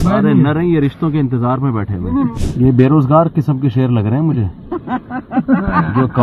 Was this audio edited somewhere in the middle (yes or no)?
yes